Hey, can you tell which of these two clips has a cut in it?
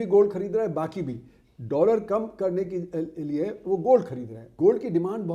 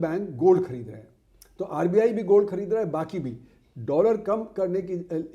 first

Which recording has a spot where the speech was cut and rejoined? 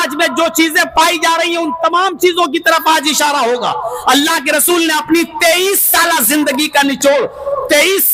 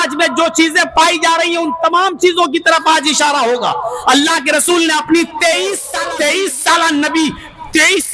second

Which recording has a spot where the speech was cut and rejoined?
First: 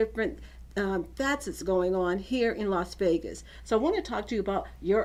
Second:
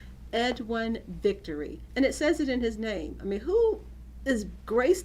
second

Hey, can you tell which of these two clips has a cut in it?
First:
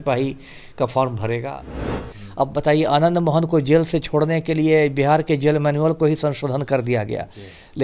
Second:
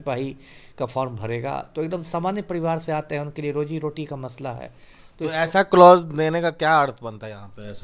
first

